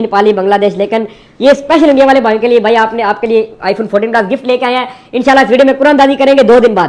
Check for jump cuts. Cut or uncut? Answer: uncut